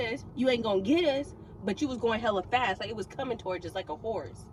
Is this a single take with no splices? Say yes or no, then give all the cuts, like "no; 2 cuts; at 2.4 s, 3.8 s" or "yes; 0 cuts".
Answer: yes; 0 cuts